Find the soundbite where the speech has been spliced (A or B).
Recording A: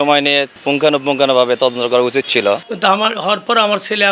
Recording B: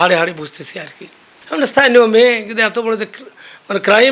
A